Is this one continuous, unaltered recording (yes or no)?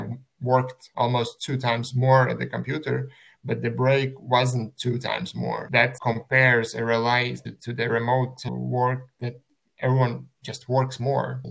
yes